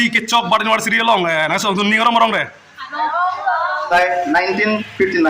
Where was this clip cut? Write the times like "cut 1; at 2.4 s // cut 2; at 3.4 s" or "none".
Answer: cut 1; at 3.8 s